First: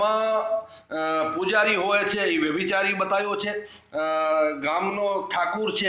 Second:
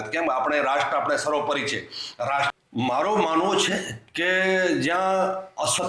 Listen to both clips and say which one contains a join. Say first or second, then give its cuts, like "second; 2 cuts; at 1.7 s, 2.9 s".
second; 1 cut; at 2.5 s